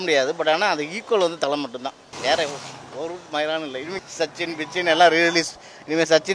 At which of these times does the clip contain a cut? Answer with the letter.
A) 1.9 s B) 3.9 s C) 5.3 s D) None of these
B